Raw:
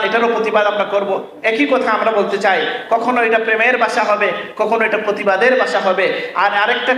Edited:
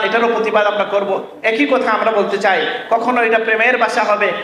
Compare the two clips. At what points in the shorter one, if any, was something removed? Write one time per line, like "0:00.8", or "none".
none